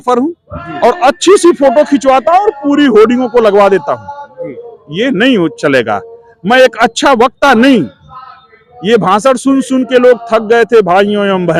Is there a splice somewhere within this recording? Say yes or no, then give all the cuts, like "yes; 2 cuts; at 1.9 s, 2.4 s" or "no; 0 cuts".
no; 0 cuts